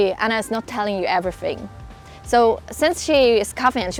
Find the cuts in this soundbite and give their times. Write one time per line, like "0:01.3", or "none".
none

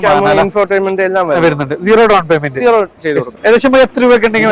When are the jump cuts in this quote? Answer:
0:03.3

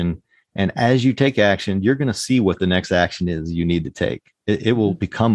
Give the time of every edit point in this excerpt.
none

